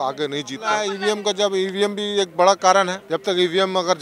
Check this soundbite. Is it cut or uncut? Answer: cut